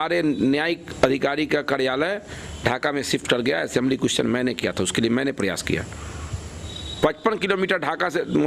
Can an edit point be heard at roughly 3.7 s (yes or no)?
no